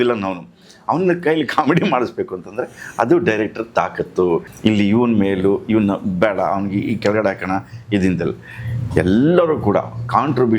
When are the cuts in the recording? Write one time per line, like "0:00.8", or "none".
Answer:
0:04.5